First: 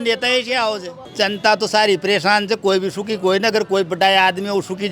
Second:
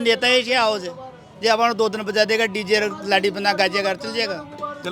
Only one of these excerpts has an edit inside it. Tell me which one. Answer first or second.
first